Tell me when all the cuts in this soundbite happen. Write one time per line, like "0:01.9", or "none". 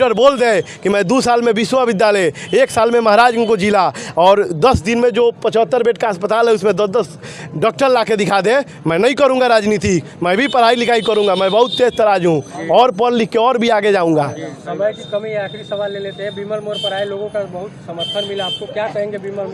none